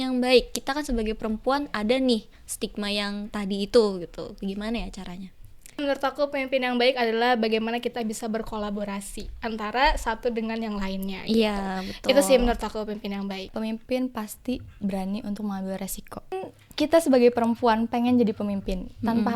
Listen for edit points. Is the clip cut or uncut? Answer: cut